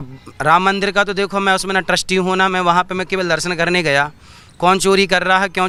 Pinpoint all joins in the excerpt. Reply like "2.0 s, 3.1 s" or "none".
none